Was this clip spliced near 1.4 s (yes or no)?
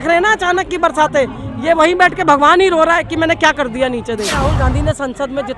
no